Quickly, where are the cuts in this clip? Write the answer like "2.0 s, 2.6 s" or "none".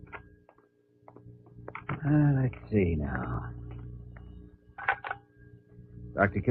none